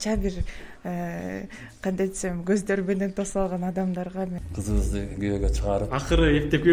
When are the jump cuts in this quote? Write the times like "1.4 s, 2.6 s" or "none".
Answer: 4.4 s

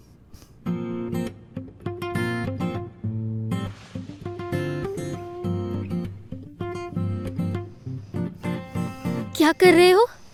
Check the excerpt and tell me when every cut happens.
none

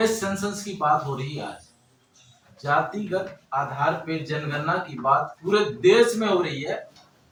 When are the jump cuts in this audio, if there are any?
none

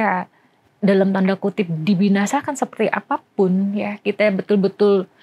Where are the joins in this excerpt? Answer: none

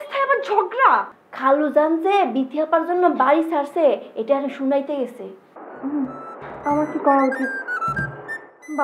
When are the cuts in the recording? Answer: 1.2 s

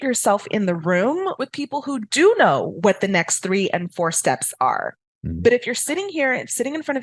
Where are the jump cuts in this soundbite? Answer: 1.3 s

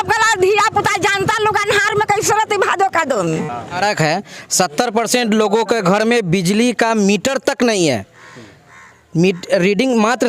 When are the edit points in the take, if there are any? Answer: 3.8 s

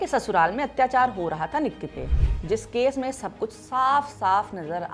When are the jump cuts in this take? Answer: none

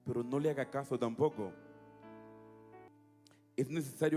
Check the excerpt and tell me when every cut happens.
2.9 s

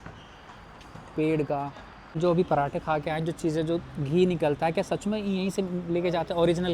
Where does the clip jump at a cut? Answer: 2.2 s

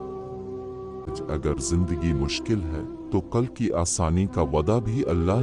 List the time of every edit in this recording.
none

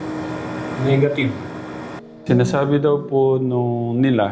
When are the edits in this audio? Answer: 1.9 s

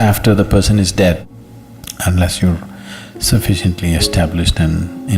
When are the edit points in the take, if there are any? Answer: 1.2 s

